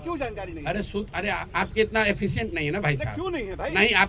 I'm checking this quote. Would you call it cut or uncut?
uncut